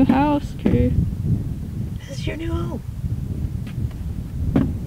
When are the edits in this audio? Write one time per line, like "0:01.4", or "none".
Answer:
none

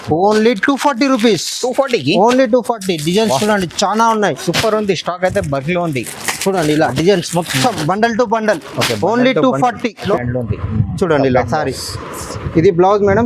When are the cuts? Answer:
0:10.0

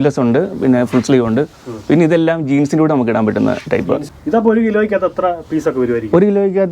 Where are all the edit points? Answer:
0:04.1

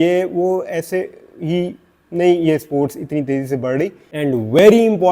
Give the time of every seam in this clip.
0:04.0

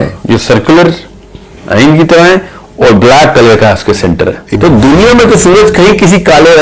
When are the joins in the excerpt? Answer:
0:04.5

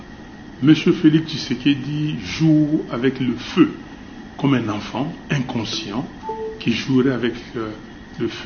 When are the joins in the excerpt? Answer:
none

